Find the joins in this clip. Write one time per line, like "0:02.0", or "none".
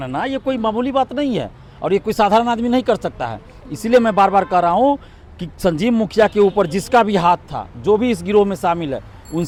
none